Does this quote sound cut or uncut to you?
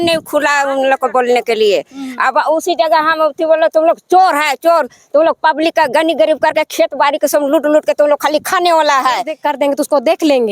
cut